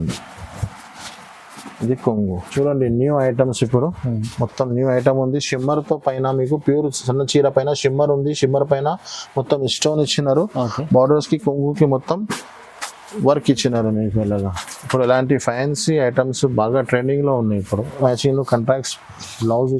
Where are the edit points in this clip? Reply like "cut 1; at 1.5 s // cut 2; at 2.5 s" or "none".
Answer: cut 1; at 2.4 s // cut 2; at 18.0 s